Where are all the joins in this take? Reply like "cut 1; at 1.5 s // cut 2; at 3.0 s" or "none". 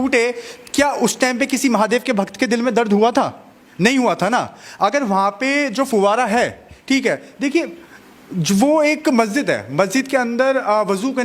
none